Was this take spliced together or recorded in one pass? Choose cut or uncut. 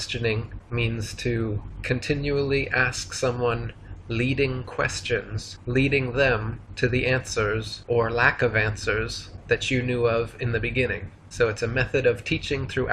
cut